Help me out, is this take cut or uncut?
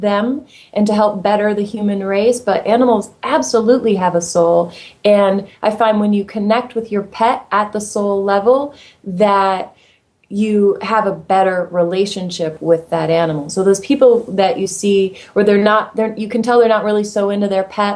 uncut